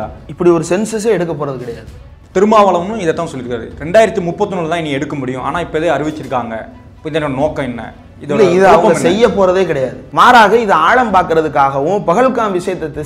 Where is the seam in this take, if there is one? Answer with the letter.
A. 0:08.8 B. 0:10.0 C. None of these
B